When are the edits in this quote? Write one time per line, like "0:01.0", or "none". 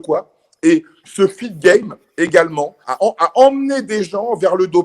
0:02.8